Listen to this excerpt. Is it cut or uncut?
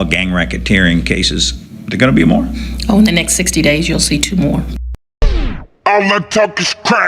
cut